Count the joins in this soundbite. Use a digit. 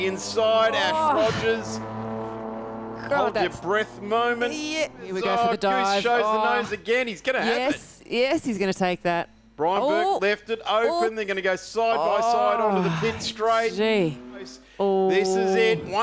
2